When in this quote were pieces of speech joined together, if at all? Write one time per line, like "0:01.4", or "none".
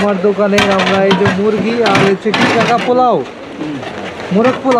none